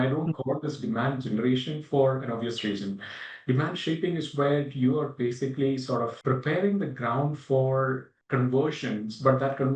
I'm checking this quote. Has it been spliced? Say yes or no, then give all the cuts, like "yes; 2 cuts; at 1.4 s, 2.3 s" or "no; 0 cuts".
no; 0 cuts